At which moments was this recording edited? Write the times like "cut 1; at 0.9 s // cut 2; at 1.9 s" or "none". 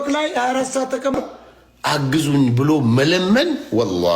cut 1; at 1.1 s